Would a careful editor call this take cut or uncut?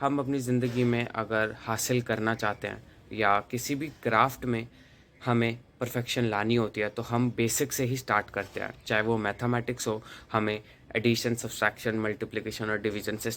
uncut